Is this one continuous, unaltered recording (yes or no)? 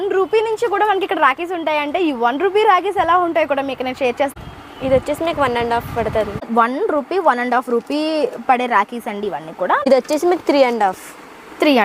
no